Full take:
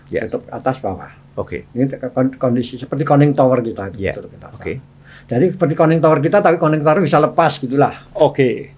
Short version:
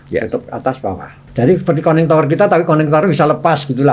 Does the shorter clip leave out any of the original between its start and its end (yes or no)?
yes